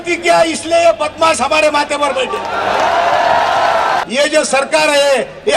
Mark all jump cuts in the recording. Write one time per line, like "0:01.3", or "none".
0:04.0

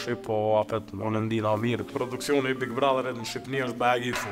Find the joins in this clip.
0:01.9

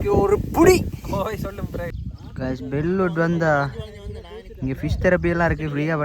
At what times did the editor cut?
0:01.9

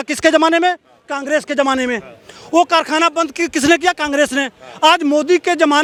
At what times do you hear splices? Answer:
none

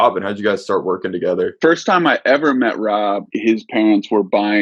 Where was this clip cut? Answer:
0:01.6
0:03.3

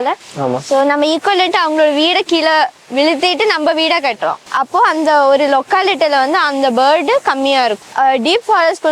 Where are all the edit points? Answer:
0:04.4
0:07.8

